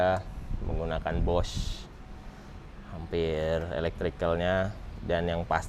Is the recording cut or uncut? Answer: uncut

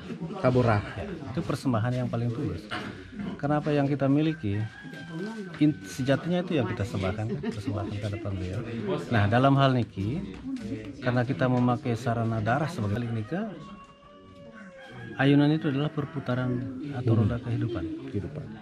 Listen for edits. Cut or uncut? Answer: cut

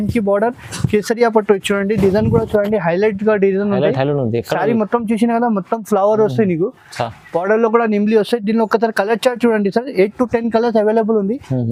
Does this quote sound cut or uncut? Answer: uncut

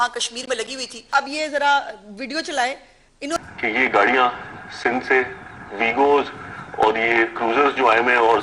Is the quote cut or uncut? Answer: cut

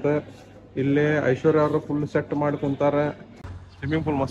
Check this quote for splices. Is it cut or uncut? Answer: cut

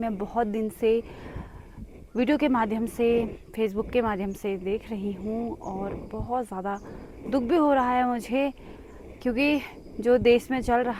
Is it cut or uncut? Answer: uncut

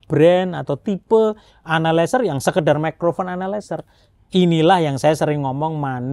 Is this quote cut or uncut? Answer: uncut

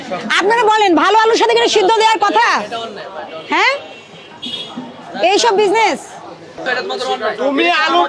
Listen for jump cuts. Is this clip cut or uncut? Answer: cut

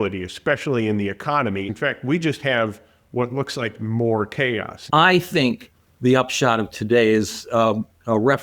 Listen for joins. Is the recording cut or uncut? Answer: cut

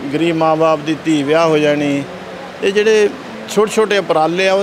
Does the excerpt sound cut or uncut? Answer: cut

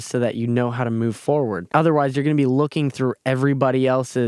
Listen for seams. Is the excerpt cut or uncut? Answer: cut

